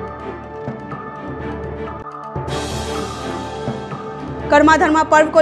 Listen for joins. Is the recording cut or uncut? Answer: uncut